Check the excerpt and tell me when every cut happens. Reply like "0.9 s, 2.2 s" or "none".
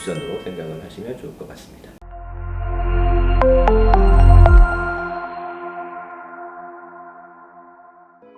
none